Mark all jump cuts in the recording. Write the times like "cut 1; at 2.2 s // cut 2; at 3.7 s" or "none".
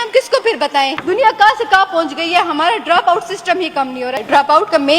cut 1; at 1.0 s // cut 2; at 4.2 s